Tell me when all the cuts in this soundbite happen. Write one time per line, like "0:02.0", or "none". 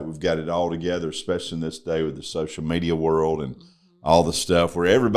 none